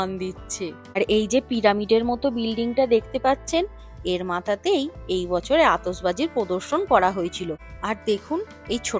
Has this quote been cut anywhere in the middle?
yes; 2 cuts; at 1.0 s, 7.7 s

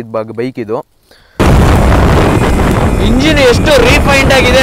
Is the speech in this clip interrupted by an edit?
yes; 1 cut; at 1.3 s

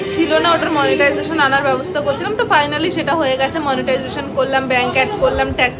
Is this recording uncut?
yes; 0 cuts

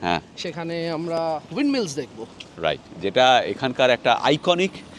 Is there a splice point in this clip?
no; 0 cuts

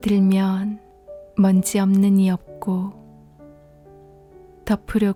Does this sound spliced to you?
no; 0 cuts

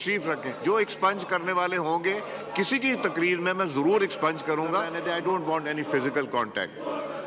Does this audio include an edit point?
yes; 1 cut; at 4.9 s

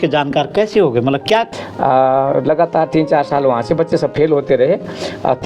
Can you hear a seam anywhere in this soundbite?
yes; 1 cut; at 1.5 s

